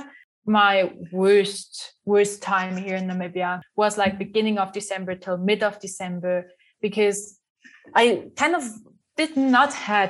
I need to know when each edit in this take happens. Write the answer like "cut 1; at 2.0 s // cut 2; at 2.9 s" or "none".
cut 1; at 3.6 s